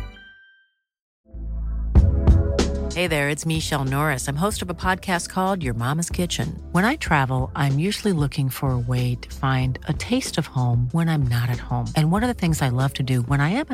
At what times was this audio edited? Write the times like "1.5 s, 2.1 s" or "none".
1.2 s